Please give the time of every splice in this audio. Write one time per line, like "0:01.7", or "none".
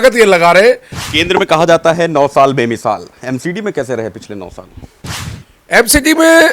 0:00.9